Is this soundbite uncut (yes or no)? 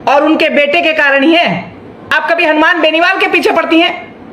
no